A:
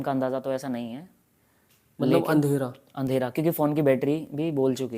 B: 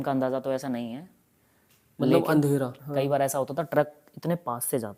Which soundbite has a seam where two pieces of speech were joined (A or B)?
B